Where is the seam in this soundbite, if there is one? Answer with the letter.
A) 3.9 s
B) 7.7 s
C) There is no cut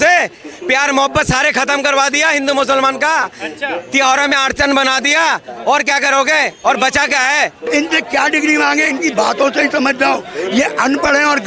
B